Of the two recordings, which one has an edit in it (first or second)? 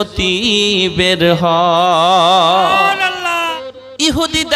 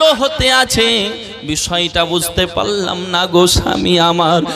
first